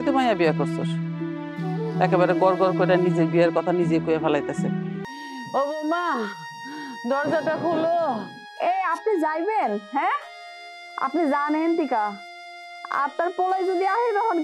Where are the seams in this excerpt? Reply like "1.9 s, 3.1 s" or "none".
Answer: 5.0 s

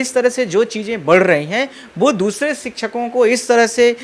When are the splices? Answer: none

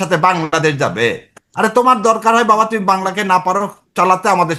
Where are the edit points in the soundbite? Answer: none

